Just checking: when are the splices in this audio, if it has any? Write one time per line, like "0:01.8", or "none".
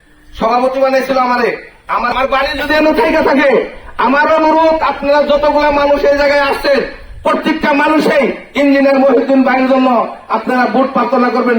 0:02.1